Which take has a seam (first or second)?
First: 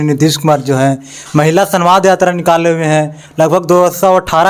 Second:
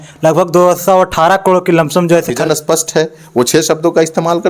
second